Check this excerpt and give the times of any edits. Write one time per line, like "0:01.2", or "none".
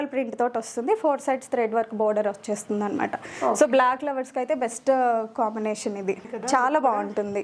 0:06.3